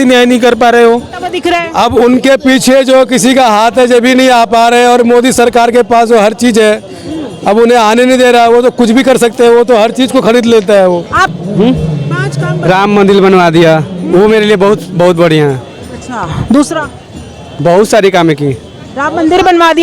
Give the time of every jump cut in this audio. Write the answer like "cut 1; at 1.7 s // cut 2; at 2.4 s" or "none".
cut 1; at 1.4 s // cut 2; at 11.2 s